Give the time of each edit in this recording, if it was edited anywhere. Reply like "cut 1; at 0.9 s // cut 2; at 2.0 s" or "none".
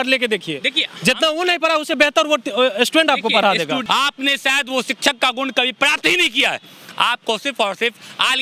cut 1; at 3.8 s